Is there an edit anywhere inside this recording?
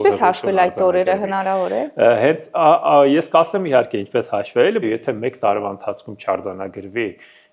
yes; 1 cut; at 4.8 s

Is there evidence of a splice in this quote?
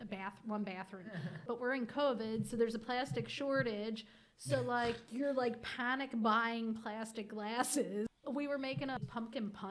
yes; 3 cuts; at 1.4 s, 8.1 s, 9.0 s

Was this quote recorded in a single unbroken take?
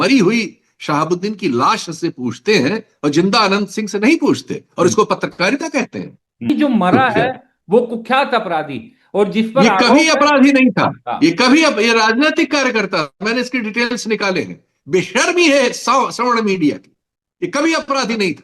no; 1 cut; at 6.5 s

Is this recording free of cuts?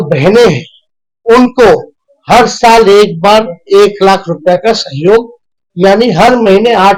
yes; 0 cuts

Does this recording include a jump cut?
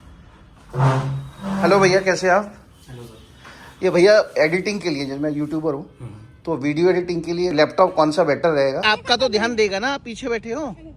yes; 2 cuts; at 7.5 s, 8.8 s

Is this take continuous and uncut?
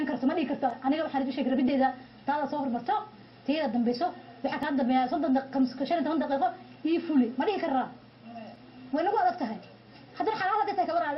no; 1 cut; at 9.5 s

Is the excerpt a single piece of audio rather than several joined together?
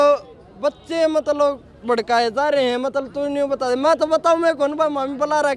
yes; 0 cuts

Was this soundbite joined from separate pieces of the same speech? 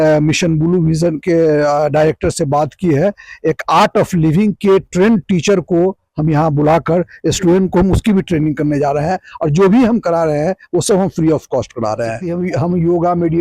yes; 1 cut; at 12.3 s

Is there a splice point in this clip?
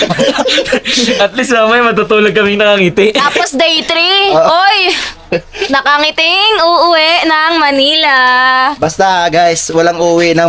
no; 0 cuts

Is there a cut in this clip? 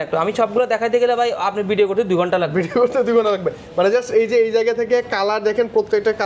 no; 0 cuts

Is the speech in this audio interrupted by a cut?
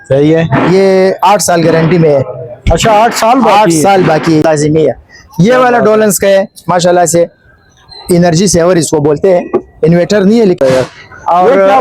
yes; 2 cuts; at 4.4 s, 10.6 s

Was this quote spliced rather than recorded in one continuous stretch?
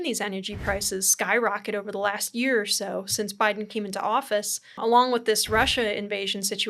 yes; 1 cut; at 4.7 s

